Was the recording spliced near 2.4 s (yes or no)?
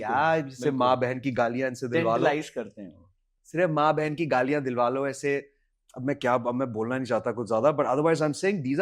no